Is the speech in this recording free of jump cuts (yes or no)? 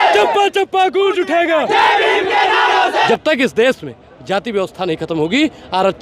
no